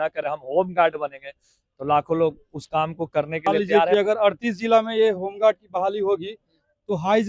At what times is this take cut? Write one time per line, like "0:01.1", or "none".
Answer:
0:03.7